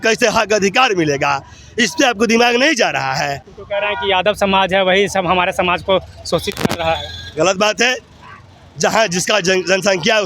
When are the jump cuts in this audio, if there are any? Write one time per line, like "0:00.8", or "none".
none